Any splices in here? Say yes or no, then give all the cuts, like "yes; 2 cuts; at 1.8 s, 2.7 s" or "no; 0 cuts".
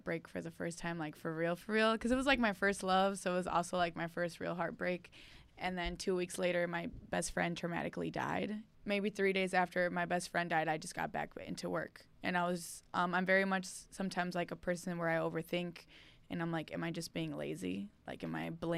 yes; 1 cut; at 8.7 s